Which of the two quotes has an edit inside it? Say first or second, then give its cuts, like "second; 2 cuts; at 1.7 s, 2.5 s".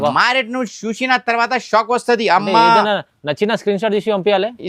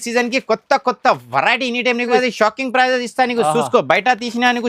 second; 1 cut; at 2.2 s